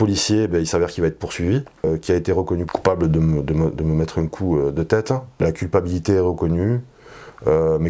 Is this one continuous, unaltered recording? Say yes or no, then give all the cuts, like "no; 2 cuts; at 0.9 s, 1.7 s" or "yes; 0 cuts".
no; 3 cuts; at 1.9 s, 2.7 s, 5.4 s